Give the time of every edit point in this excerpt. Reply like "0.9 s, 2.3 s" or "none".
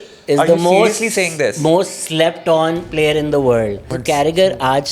3.9 s